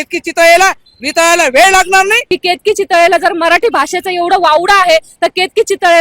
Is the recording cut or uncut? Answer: cut